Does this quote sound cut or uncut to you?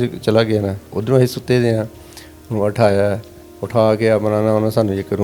uncut